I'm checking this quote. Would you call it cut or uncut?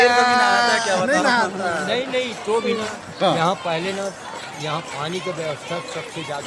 uncut